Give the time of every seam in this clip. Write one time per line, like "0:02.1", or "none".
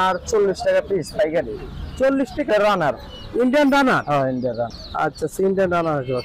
0:02.5